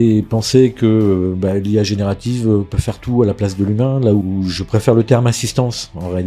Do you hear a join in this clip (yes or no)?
yes